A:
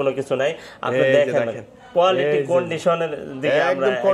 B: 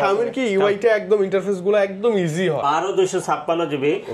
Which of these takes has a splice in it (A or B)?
B